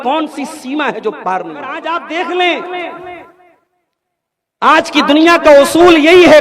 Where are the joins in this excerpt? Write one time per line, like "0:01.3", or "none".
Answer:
0:01.8